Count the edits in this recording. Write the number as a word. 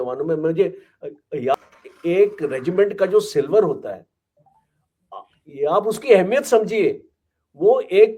one